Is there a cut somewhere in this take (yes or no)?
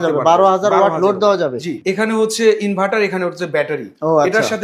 yes